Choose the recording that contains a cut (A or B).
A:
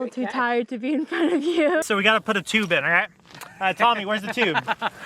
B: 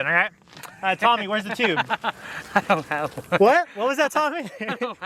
A